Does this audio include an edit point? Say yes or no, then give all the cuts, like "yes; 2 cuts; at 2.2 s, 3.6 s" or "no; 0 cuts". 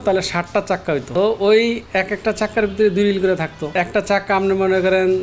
yes; 2 cuts; at 1.1 s, 3.6 s